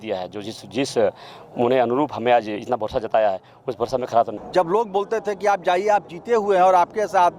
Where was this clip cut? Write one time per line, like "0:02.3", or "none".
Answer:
0:04.4